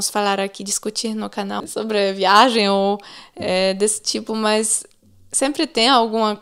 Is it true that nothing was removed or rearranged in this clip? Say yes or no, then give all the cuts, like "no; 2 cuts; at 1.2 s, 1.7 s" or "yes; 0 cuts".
no; 1 cut; at 1.6 s